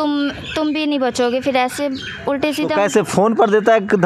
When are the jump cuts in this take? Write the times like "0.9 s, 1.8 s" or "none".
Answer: none